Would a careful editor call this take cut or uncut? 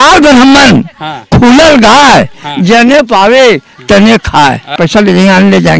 cut